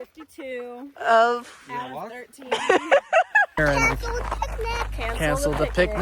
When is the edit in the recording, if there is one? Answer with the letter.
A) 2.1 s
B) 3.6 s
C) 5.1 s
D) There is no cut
B